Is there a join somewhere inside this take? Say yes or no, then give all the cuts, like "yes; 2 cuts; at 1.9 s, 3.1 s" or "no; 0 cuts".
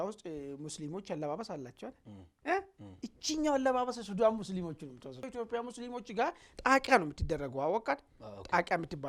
yes; 1 cut; at 5.3 s